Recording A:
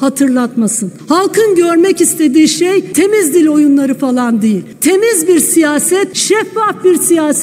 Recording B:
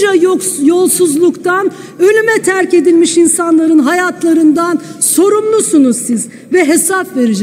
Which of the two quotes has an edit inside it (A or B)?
A